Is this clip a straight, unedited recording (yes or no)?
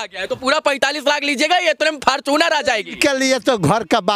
yes